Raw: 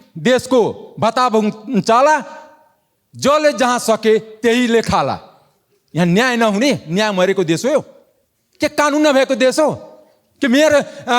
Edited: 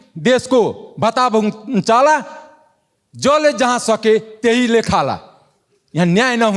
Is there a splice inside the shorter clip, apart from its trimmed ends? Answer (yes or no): no